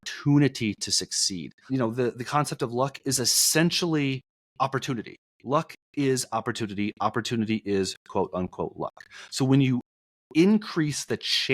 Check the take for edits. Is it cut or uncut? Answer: cut